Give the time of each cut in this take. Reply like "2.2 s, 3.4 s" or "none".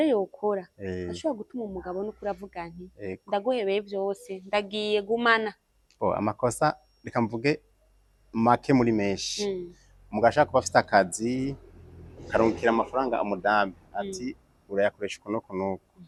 none